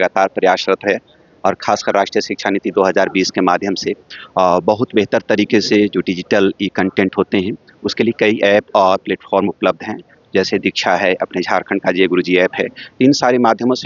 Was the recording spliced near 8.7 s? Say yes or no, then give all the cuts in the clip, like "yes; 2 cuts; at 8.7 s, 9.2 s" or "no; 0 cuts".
no; 0 cuts